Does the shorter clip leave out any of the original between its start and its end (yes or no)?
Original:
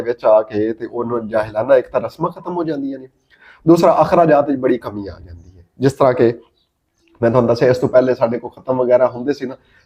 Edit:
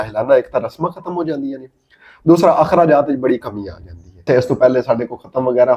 yes